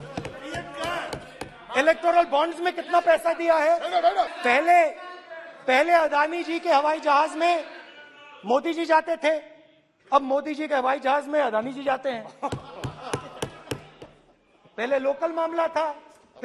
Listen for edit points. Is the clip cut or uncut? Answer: cut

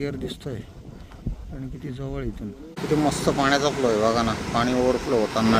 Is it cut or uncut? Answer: cut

